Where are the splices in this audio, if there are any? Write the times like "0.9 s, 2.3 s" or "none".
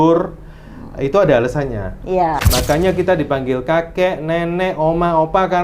2.4 s

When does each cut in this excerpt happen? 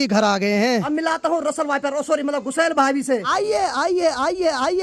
0.8 s, 3.3 s

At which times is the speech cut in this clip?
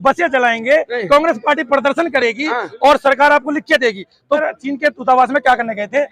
4.4 s

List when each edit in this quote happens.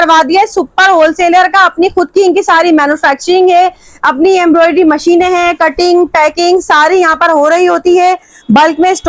none

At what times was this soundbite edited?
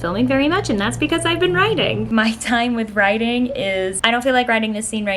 2.1 s, 4.0 s

